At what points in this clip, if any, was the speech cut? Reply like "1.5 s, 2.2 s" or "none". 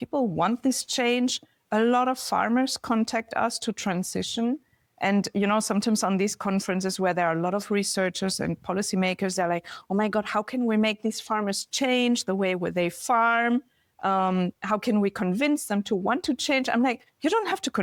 none